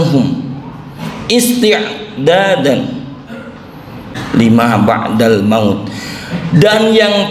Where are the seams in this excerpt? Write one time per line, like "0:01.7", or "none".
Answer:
0:04.1